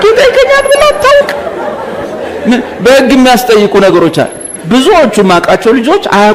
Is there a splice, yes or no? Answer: no